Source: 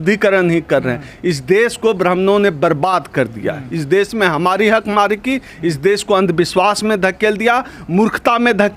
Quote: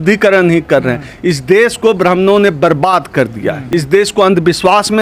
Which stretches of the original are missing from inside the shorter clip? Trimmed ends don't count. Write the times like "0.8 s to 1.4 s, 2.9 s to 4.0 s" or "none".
3.6 s to 5.5 s